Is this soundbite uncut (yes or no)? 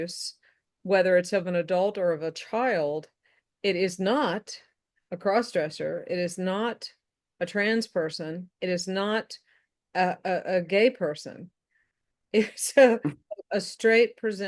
yes